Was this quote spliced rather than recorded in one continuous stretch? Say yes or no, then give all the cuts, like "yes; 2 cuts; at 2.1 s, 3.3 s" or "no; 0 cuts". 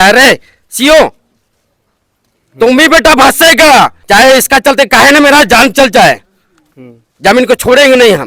yes; 1 cut; at 4.0 s